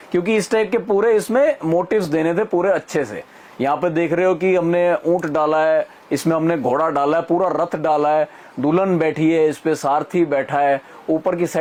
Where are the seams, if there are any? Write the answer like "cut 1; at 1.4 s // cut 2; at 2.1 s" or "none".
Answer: none